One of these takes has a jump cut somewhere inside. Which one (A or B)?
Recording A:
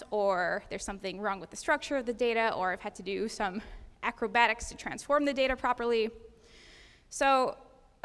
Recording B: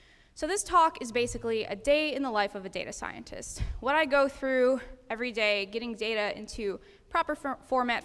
A